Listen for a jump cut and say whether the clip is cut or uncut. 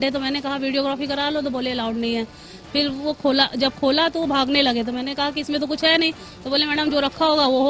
uncut